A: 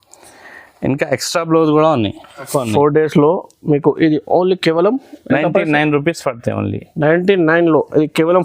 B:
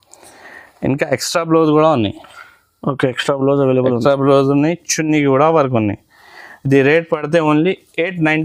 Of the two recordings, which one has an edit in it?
A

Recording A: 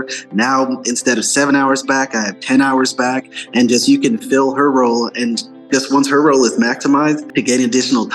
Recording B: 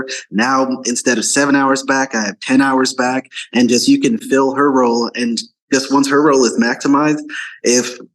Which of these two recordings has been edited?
A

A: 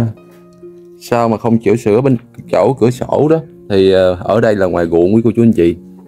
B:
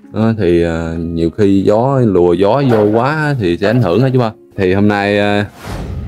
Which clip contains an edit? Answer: B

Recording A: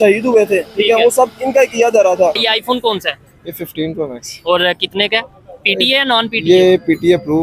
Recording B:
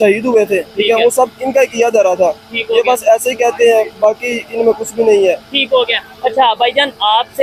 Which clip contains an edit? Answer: A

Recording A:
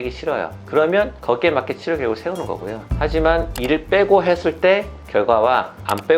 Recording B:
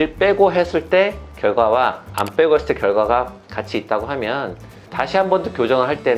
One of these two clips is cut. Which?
A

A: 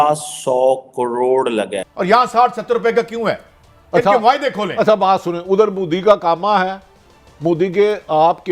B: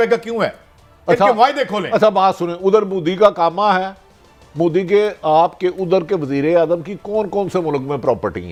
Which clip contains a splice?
A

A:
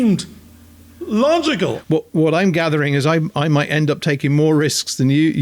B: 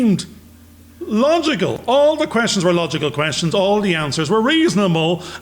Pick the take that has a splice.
A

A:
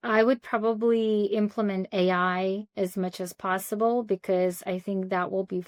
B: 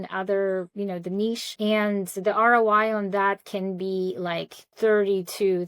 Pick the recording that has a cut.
B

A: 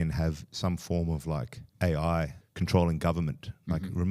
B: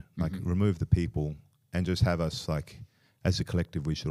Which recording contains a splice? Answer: A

